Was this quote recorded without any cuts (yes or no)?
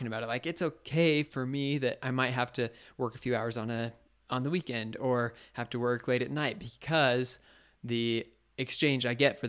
yes